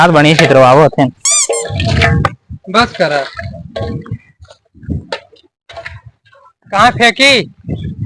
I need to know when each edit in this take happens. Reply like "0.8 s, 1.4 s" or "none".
none